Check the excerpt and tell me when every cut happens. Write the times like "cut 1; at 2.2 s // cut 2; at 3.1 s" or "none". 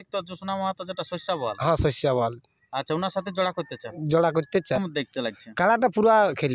cut 1; at 4.8 s